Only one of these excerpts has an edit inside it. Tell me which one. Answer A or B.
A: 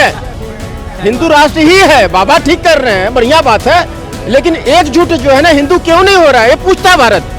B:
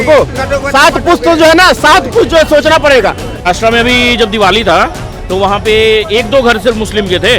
B